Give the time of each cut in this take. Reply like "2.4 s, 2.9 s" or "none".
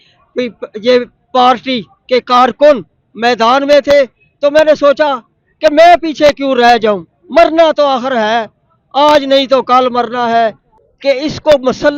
10.7 s